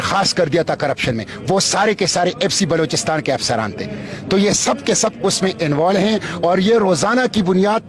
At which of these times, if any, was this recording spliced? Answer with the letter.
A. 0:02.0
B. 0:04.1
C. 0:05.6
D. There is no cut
D